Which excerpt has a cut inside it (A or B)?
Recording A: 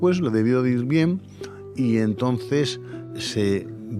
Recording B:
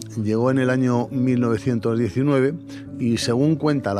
A